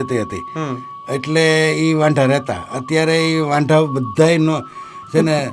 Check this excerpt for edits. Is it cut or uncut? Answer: uncut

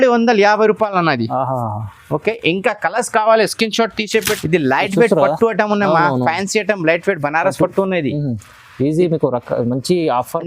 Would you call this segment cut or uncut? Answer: cut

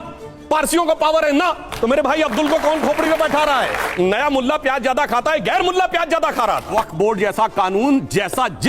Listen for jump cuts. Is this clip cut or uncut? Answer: cut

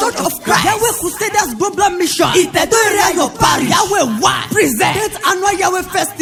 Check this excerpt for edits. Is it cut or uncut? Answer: uncut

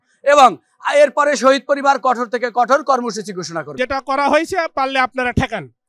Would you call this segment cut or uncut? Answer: cut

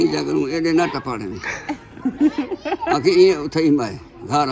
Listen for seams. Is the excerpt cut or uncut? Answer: uncut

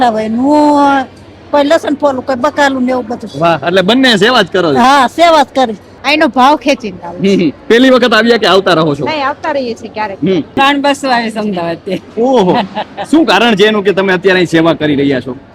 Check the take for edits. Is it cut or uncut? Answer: cut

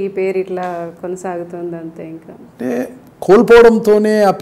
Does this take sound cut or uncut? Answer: uncut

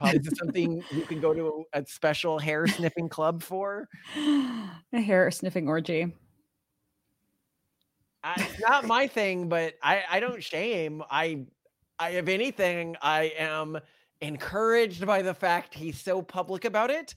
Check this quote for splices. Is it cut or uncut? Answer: uncut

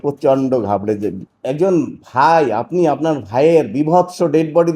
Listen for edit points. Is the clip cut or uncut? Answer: cut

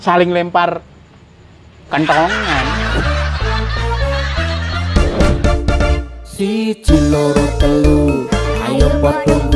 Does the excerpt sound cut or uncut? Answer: cut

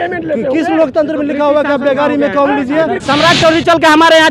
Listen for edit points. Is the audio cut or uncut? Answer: cut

